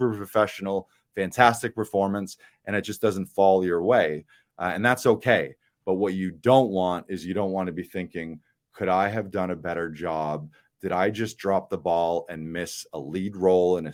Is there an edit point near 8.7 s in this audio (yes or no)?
no